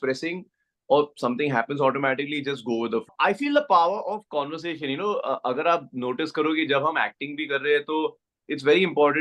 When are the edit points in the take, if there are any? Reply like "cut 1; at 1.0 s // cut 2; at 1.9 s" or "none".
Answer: cut 1; at 3.1 s